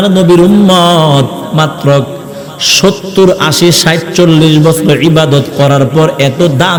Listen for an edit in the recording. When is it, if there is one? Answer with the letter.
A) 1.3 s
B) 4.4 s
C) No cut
C